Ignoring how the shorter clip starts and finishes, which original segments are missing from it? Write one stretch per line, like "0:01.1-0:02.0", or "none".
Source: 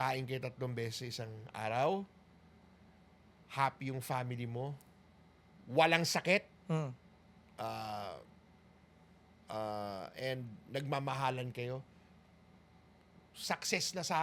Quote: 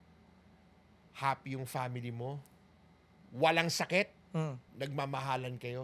0:07.0-0:10.6